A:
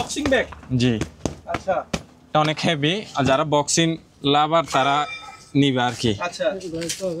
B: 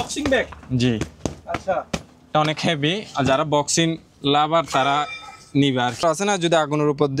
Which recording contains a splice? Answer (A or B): B